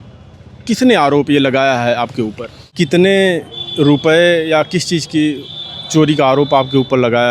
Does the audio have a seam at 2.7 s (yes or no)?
yes